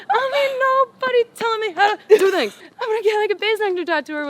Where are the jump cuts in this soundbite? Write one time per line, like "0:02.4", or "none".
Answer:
0:02.6